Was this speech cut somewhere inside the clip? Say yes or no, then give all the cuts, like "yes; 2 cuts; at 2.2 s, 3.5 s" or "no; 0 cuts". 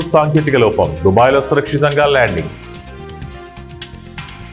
no; 0 cuts